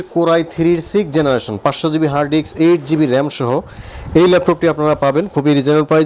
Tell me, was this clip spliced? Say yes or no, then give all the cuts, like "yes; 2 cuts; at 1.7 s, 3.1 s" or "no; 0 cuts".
no; 0 cuts